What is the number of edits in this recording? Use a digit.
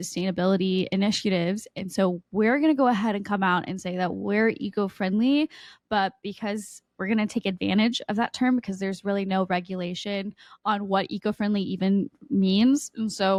0